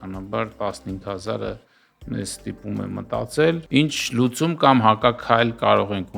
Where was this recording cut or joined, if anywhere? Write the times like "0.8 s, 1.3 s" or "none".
3.6 s